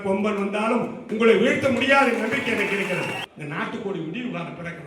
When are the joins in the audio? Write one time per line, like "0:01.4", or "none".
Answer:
0:03.3

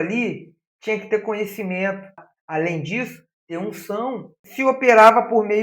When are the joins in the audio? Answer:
0:02.3
0:04.4

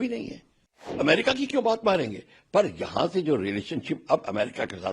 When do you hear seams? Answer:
0:01.0

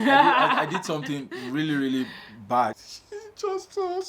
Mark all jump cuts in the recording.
0:02.7

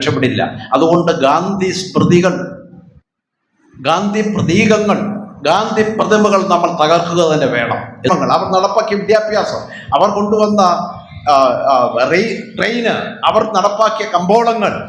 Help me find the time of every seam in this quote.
0:08.1

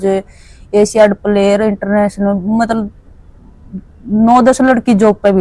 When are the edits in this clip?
none

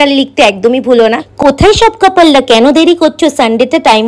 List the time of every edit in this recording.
none

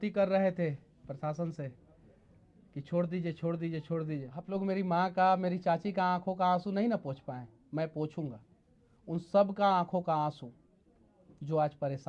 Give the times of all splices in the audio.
0:04.4

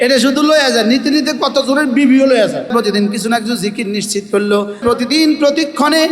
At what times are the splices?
0:02.7
0:04.8

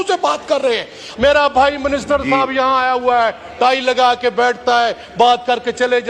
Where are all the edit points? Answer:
0:01.0

